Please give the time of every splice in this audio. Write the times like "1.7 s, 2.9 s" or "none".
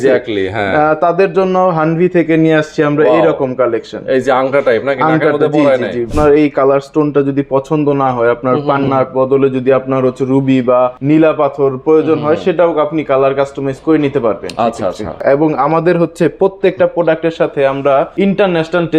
6.1 s, 11.0 s, 15.1 s, 18.1 s